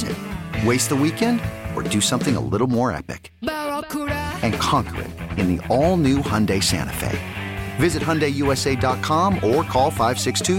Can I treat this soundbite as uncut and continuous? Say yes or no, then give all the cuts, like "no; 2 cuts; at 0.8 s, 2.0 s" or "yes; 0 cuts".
yes; 0 cuts